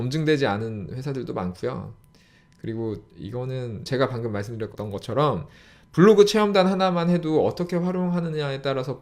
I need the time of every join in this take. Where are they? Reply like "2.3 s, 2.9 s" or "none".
3.9 s, 4.7 s